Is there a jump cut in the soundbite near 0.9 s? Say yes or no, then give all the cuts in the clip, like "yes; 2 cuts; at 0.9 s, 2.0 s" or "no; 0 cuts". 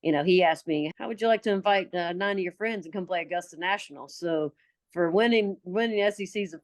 yes; 1 cut; at 0.9 s